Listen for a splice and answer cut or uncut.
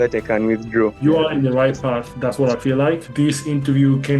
cut